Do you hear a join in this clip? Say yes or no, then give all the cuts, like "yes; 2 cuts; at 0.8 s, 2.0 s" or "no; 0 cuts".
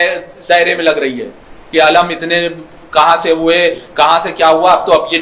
no; 0 cuts